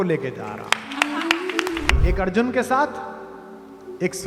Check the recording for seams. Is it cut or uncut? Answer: cut